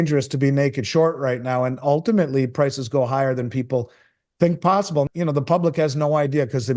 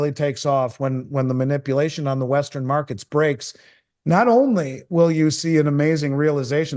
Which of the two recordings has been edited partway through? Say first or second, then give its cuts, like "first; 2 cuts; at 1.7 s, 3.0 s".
first; 1 cut; at 5.1 s